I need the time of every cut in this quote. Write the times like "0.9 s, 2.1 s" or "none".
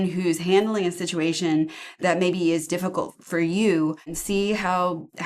4.2 s